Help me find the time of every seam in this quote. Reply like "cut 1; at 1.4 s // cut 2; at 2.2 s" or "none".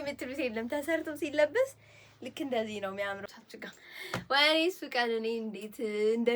cut 1; at 3.2 s